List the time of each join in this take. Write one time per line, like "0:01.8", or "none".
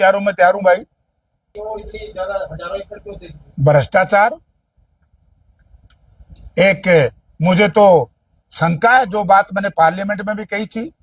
0:01.5